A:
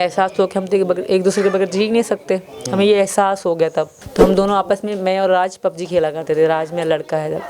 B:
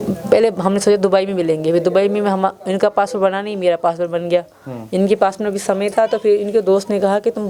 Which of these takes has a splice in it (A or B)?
A